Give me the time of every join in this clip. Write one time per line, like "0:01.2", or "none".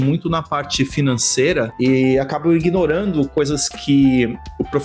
none

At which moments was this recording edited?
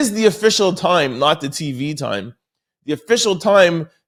none

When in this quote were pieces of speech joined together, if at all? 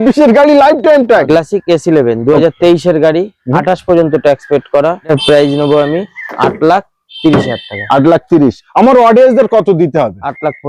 0:01.2
0:05.1

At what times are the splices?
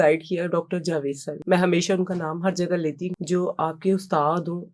0:01.3
0:03.1

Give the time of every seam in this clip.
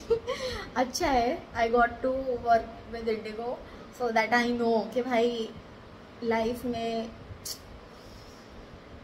none

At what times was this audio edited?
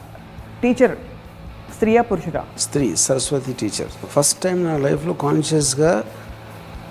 0:02.6
0:04.1

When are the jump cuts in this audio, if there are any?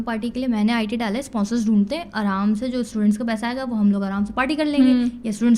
none

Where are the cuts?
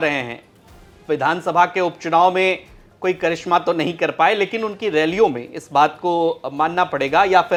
none

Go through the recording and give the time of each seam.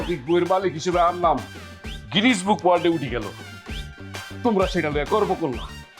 0:04.3

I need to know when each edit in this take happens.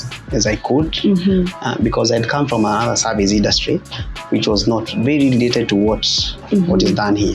none

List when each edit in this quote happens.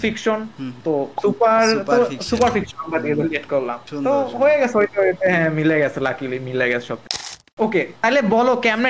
0:07.3

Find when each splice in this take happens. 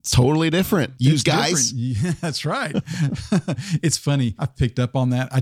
0:00.9
0:04.4

